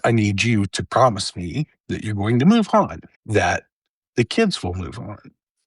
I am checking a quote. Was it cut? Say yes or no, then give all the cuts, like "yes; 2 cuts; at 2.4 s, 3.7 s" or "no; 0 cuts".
no; 0 cuts